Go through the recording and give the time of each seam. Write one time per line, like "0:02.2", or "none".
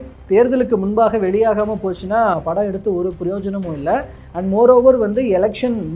none